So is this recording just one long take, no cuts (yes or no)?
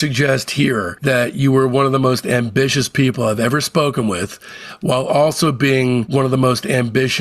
yes